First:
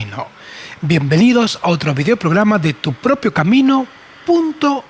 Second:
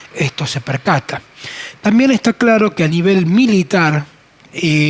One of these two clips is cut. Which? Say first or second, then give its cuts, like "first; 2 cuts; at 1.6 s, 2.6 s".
second; 1 cut; at 2.9 s